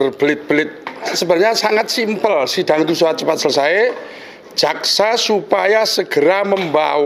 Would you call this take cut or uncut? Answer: cut